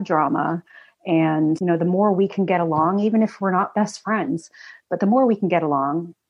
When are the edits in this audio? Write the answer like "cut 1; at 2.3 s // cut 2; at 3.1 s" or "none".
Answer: none